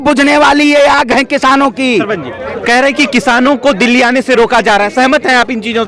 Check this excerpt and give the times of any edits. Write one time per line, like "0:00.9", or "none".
none